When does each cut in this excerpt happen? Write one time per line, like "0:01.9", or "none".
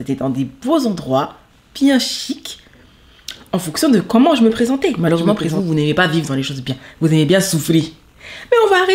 0:05.0